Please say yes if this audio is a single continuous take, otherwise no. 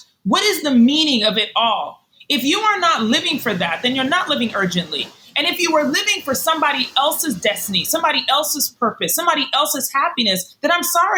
yes